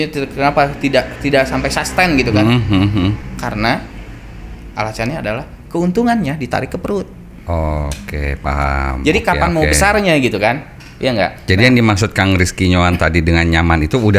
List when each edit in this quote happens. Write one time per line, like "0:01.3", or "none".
none